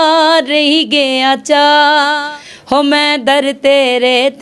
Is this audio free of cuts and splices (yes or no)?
no